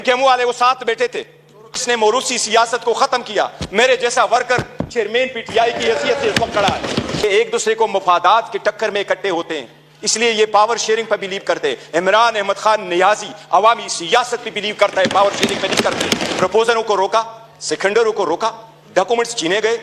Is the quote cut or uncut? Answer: cut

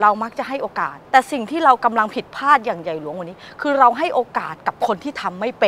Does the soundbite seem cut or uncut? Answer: cut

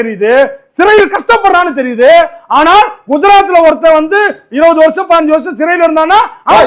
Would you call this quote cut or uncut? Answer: uncut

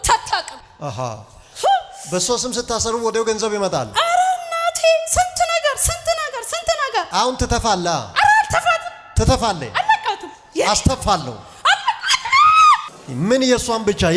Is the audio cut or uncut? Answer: cut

